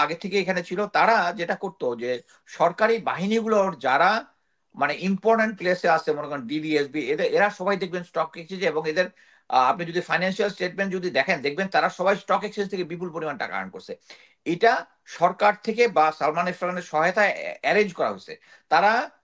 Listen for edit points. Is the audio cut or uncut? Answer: uncut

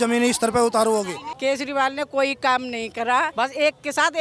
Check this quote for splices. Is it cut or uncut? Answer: cut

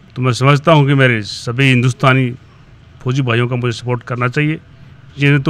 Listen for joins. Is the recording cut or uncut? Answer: uncut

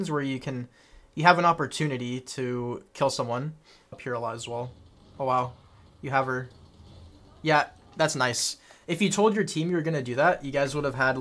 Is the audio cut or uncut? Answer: cut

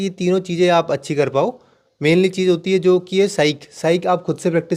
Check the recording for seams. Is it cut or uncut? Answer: uncut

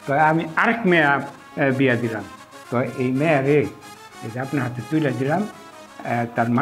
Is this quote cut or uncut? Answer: uncut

